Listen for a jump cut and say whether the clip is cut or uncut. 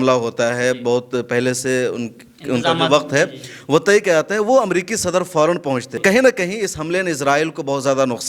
cut